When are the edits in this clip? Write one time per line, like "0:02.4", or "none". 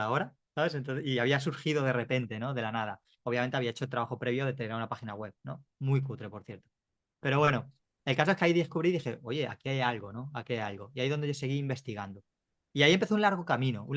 none